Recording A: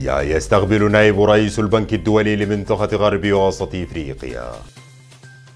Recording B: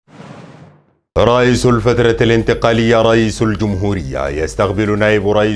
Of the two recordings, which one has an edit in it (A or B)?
B